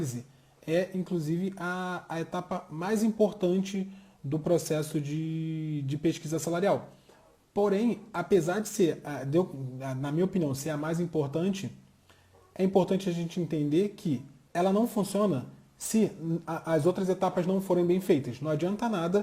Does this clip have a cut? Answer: no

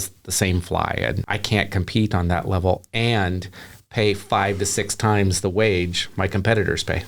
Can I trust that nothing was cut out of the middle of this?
no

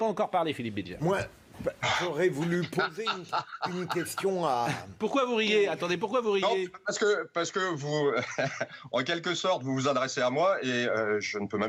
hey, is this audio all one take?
yes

